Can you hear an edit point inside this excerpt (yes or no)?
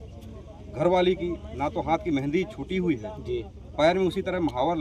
no